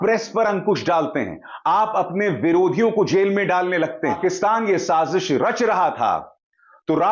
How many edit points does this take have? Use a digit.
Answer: 1